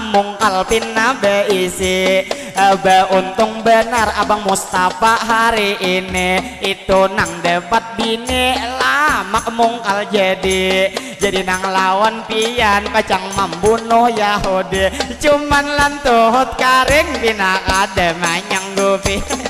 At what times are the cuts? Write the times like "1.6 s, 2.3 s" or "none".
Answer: none